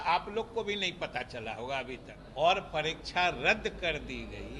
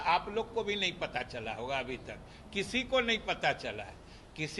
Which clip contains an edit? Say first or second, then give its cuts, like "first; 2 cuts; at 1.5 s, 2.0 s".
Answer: first; 1 cut; at 2.2 s